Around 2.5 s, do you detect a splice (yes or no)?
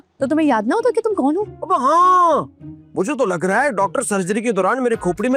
no